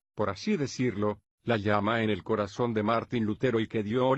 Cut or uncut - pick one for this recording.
cut